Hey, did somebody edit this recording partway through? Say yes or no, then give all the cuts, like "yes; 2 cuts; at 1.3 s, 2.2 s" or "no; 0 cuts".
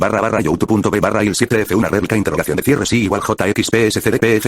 yes; 1 cut; at 1.1 s